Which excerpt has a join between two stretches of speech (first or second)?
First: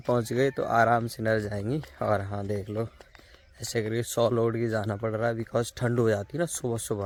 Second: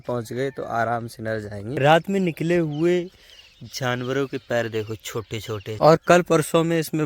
second